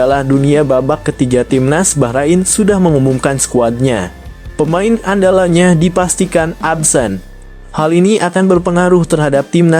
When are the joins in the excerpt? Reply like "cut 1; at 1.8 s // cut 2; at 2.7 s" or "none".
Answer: none